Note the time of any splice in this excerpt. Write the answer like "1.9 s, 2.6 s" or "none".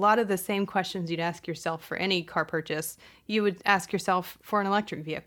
4.4 s